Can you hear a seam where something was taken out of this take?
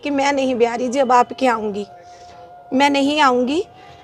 no; 0 cuts

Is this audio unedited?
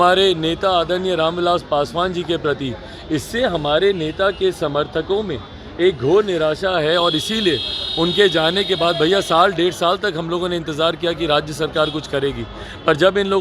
yes; 0 cuts

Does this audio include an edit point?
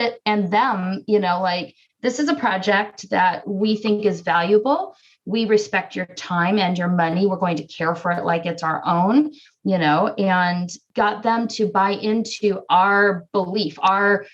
no; 0 cuts

